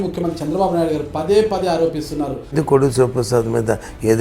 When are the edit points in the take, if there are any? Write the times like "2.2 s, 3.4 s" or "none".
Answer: 2.5 s